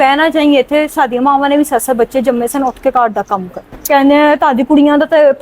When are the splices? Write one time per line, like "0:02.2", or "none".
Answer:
0:03.9